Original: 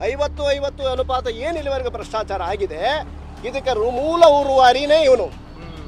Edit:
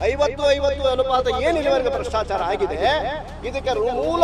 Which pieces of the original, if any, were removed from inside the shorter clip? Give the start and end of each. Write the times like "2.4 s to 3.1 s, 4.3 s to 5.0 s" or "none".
none